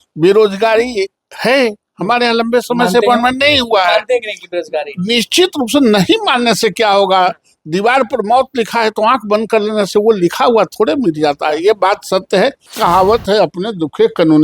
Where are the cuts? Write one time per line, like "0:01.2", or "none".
0:12.7